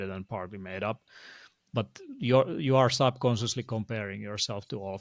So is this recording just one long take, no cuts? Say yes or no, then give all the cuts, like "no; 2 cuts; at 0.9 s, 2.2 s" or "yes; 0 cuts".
yes; 0 cuts